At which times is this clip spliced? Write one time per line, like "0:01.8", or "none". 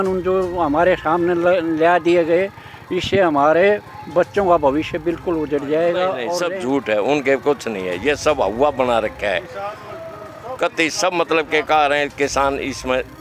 0:06.4